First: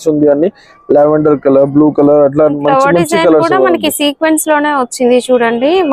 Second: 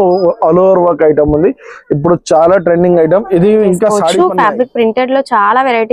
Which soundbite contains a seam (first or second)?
second